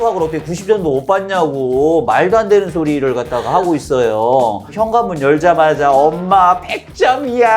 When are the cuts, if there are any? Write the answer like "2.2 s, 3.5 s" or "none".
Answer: 4.7 s

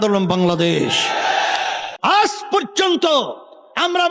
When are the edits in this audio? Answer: 1.8 s

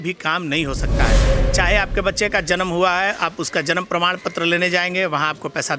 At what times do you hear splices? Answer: none

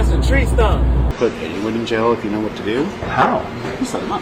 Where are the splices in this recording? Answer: 1.1 s

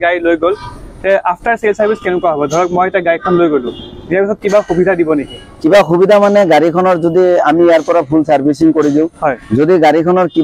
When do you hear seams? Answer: none

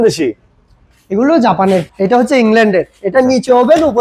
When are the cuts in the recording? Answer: 1.9 s

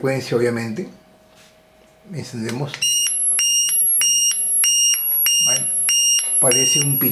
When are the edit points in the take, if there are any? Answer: none

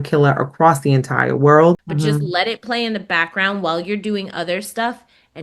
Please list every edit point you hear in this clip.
1.9 s

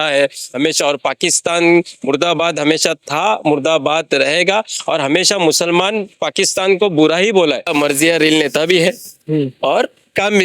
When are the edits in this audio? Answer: 7.7 s

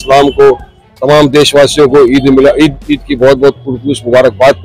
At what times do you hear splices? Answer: none

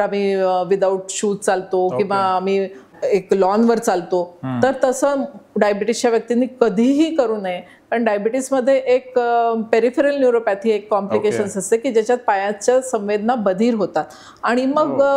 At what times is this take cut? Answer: 2.9 s

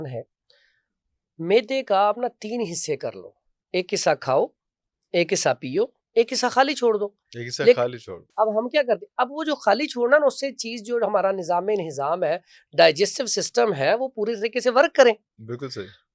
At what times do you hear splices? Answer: none

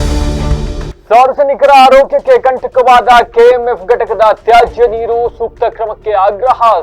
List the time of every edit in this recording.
0.9 s

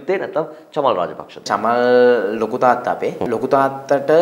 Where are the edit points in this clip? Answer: 1.5 s, 3.2 s

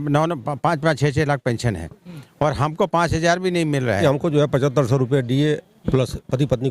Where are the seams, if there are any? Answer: 4.0 s

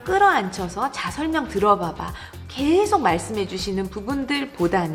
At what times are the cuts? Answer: none

